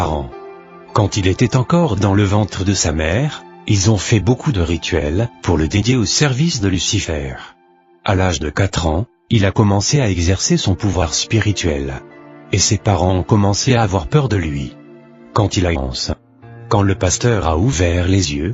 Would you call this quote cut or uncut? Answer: uncut